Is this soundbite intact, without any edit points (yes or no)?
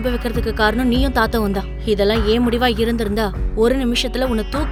yes